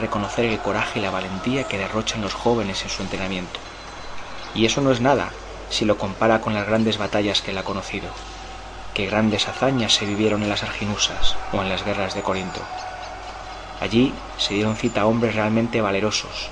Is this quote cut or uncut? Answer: cut